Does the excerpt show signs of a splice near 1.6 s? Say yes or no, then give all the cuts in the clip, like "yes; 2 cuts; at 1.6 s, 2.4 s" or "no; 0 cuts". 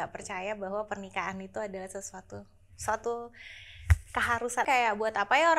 no; 1 cut; at 4.6 s